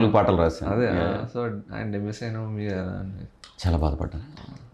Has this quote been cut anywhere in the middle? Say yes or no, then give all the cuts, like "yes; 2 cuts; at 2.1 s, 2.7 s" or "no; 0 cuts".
no; 0 cuts